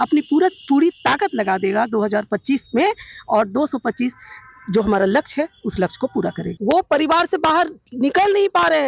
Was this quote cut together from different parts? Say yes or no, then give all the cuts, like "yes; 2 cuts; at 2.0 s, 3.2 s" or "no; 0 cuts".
yes; 1 cut; at 6.5 s